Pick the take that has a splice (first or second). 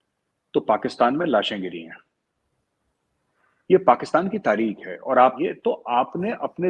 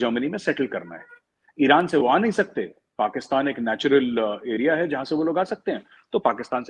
first